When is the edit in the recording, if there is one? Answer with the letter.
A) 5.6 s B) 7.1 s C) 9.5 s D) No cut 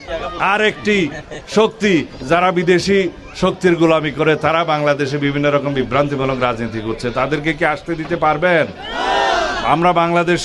D